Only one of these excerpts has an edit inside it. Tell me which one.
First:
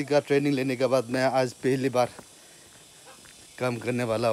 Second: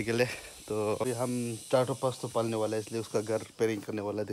second; 1 cut; at 1.1 s

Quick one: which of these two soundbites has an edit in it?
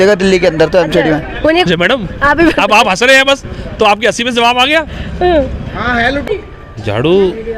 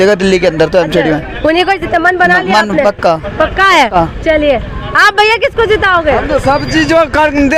first; 2 cuts; at 1.7 s, 6.3 s

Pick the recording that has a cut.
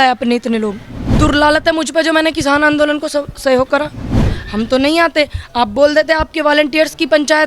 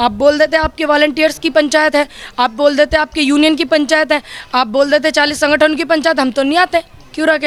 first; 2 cuts; at 1.0 s, 4.2 s

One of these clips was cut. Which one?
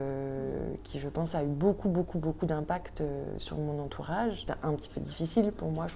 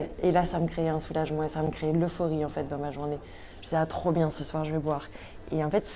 first; 1 cut; at 4.5 s

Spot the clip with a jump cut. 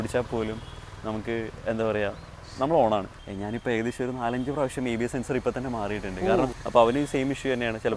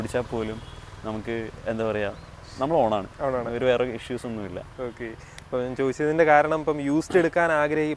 first; 2 cuts; at 3.1 s, 6.5 s

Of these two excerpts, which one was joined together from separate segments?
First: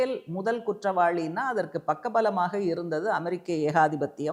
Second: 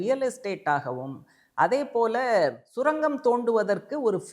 second; 1 cut; at 2.7 s

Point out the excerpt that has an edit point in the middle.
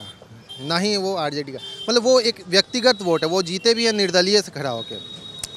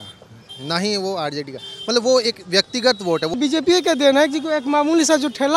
second; 1 cut; at 3.3 s

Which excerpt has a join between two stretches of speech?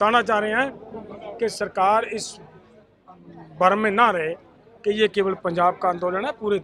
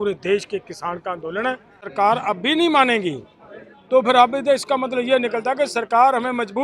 second; 1 cut; at 1.8 s

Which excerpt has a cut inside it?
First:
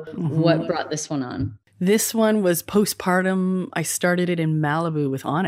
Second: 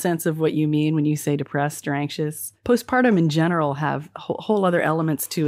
second; 1 cut; at 2.5 s

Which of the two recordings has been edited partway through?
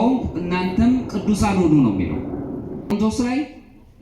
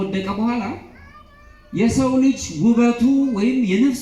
first; 1 cut; at 2.9 s

